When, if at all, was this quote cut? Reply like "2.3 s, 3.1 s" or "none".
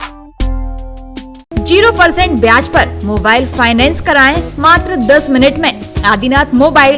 none